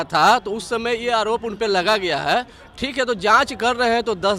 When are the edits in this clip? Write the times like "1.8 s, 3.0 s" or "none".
none